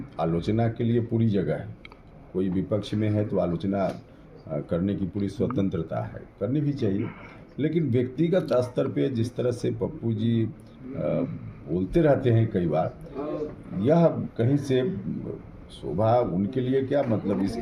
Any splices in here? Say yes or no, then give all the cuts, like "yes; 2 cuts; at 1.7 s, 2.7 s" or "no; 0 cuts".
no; 0 cuts